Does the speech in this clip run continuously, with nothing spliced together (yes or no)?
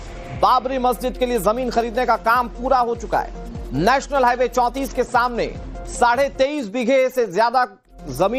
yes